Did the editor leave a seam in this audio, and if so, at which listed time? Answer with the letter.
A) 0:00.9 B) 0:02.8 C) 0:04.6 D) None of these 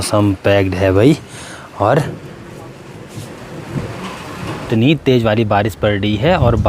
C